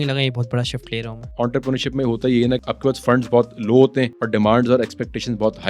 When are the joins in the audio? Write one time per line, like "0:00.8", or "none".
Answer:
0:01.3
0:04.2